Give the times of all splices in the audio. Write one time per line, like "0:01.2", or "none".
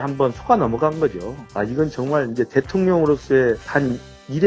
0:01.4